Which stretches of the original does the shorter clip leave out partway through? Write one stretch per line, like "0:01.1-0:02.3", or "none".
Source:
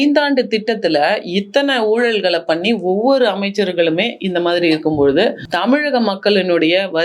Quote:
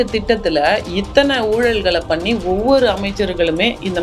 none